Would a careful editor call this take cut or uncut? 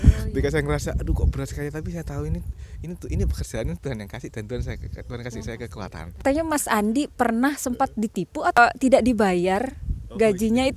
cut